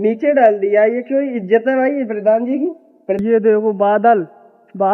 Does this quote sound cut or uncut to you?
cut